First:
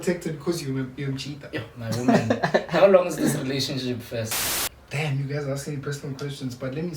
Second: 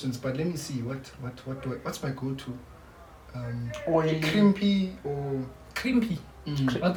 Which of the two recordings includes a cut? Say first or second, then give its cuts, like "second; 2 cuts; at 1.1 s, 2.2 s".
first; 1 cut; at 4.4 s